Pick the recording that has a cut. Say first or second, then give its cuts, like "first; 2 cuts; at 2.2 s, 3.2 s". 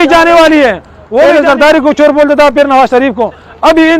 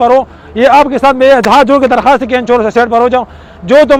first; 1 cut; at 1.2 s